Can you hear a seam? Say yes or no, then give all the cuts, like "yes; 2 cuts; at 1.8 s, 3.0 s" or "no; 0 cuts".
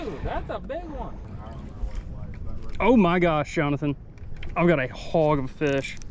yes; 1 cut; at 1.3 s